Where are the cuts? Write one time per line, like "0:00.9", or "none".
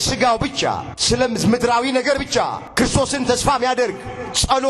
0:00.9
0:02.6